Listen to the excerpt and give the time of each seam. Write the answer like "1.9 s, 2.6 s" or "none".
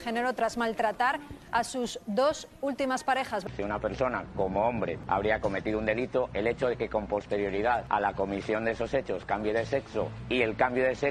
3.5 s, 5.0 s, 7.8 s, 10.2 s